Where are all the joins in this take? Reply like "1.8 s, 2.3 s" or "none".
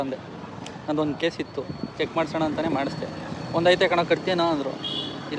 none